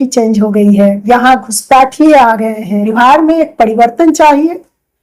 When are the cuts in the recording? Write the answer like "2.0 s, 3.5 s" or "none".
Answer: 1.0 s, 2.8 s